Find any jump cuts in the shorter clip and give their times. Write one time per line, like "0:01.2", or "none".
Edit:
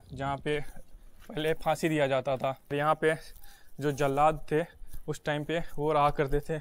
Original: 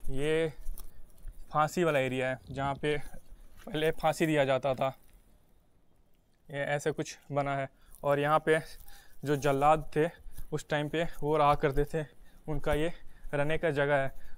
0:02.7